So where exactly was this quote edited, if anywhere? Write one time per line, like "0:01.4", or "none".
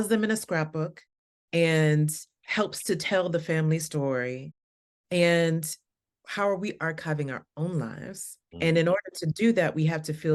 none